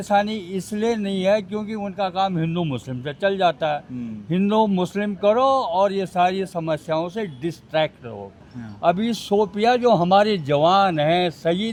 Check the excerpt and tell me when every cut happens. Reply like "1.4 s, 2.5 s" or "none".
none